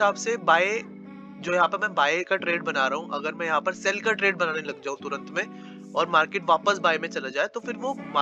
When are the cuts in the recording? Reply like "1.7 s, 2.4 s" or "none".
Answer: none